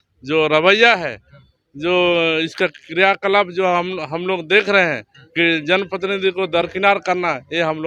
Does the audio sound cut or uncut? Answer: uncut